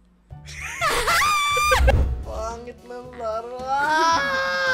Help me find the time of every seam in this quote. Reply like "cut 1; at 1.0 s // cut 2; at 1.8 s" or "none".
cut 1; at 1.9 s